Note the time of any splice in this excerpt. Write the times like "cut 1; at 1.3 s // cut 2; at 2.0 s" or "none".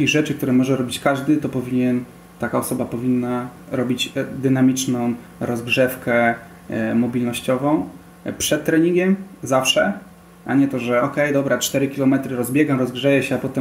cut 1; at 3.6 s